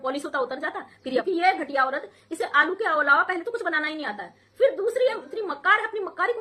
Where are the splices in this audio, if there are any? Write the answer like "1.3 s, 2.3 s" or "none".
1.2 s